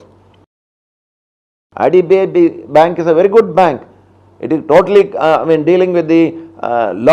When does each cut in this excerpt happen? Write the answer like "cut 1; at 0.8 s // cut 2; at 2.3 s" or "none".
cut 1; at 1.0 s